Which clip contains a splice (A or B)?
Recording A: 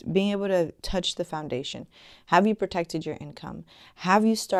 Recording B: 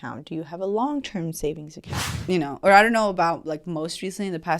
B